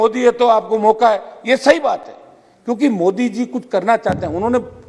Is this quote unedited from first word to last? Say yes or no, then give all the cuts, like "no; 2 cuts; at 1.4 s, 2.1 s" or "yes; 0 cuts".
yes; 0 cuts